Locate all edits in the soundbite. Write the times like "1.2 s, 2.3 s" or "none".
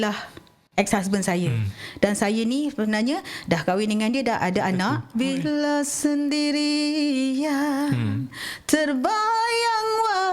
5.1 s